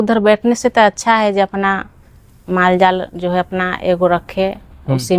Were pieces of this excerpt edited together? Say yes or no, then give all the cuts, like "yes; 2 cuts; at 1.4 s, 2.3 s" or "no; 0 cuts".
no; 0 cuts